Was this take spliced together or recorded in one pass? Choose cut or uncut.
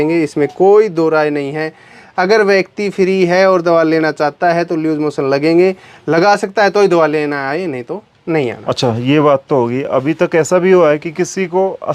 uncut